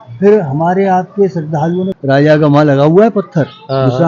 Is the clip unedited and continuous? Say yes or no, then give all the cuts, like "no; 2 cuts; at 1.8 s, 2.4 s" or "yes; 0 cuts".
no; 1 cut; at 1.9 s